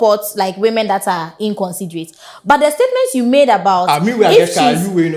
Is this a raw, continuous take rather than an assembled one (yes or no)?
yes